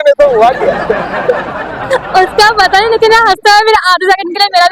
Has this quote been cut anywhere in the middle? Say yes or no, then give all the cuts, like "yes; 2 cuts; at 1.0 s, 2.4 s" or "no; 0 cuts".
no; 0 cuts